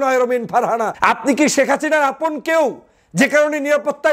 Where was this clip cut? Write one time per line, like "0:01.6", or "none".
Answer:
0:00.9